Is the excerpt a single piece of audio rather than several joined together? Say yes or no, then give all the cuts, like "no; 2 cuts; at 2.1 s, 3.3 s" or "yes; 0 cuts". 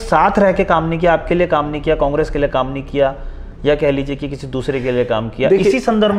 yes; 0 cuts